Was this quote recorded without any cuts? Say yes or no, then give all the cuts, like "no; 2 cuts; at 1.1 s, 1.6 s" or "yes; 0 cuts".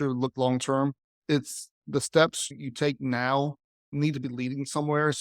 yes; 0 cuts